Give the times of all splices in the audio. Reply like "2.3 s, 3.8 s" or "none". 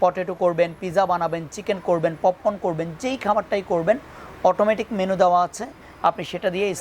none